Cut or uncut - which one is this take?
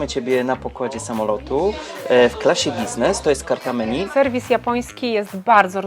cut